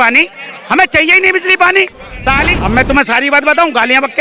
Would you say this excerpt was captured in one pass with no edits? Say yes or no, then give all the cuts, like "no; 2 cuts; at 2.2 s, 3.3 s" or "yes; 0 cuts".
no; 1 cut; at 2.5 s